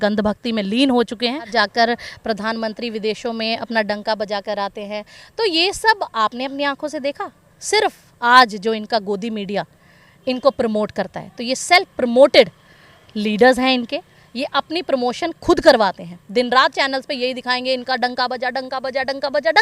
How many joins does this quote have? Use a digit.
1